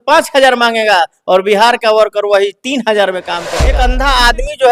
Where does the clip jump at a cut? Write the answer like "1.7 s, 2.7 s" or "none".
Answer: 3.6 s